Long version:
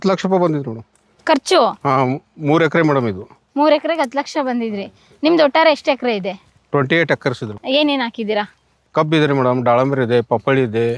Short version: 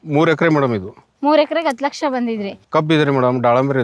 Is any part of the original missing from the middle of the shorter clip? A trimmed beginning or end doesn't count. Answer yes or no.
yes